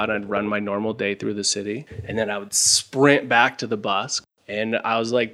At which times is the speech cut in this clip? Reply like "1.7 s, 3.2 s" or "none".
4.2 s